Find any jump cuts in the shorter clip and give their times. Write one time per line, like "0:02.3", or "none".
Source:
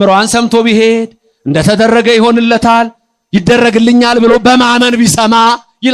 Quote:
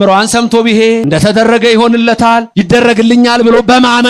0:01.0
0:02.5